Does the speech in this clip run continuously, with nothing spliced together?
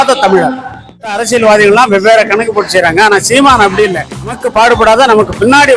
no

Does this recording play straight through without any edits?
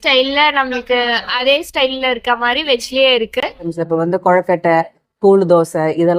no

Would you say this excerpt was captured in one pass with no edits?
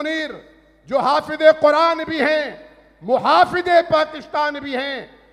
yes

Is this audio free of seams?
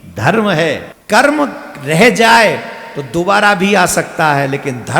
no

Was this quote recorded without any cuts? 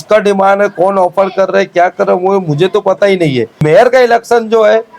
no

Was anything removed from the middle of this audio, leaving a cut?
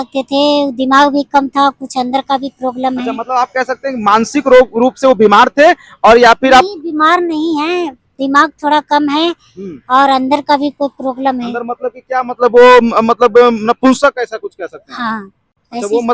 no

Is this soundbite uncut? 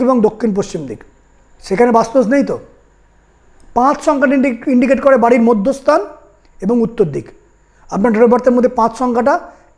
yes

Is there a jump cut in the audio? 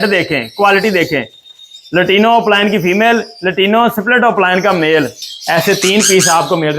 yes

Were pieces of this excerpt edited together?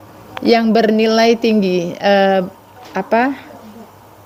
no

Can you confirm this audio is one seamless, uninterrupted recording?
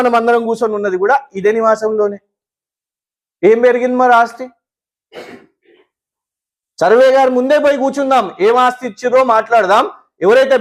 yes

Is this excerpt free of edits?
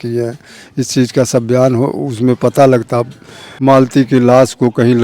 no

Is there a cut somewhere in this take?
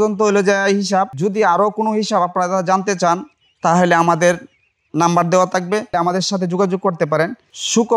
yes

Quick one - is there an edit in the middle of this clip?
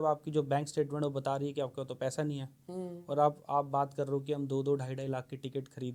no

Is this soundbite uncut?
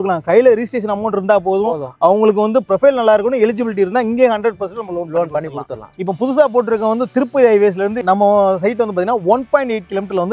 no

